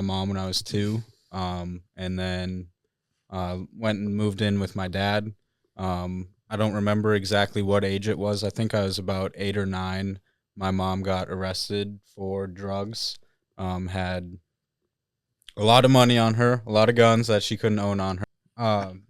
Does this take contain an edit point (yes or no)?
yes